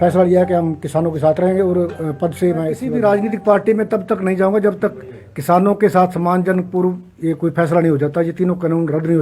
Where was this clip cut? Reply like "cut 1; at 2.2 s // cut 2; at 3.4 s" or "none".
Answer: cut 1; at 2.8 s